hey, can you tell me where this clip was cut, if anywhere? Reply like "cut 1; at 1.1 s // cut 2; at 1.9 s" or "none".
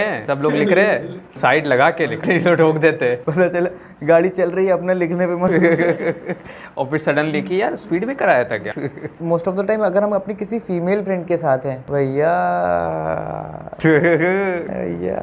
cut 1; at 1.2 s // cut 2; at 9.1 s

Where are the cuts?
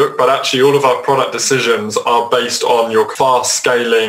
cut 1; at 3.1 s

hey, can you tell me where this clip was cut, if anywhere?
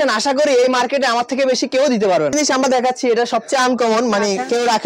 cut 1; at 2.3 s

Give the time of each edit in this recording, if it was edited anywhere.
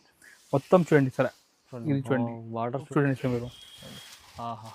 cut 1; at 2.9 s

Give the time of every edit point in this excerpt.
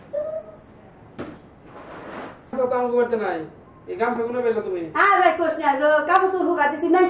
cut 1; at 2.5 s

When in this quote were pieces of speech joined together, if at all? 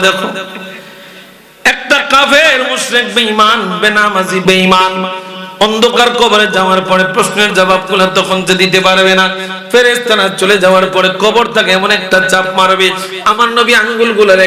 cut 1; at 4.4 s

